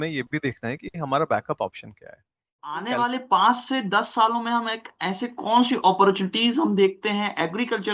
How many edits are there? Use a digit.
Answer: 1